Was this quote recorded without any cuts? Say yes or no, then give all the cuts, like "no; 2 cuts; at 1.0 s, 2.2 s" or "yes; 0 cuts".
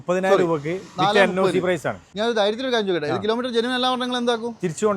no; 1 cut; at 2.0 s